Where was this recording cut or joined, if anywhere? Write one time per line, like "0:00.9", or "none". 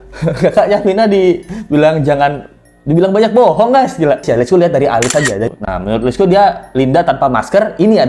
0:04.2
0:05.5